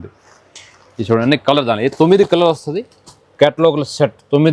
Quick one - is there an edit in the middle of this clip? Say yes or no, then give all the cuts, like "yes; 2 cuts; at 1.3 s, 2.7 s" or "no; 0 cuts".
no; 0 cuts